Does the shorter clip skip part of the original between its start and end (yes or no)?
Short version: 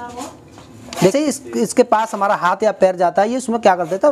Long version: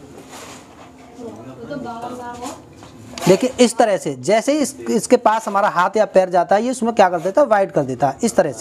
yes